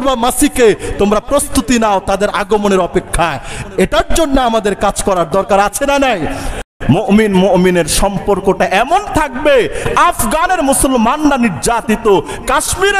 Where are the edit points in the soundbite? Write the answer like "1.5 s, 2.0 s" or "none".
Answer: 6.7 s, 9.8 s